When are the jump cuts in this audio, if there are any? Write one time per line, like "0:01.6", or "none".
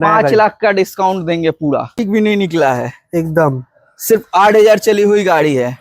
0:01.9